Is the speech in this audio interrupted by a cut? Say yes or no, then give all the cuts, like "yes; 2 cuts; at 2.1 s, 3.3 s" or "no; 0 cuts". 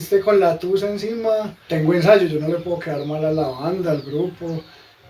yes; 1 cut; at 1.6 s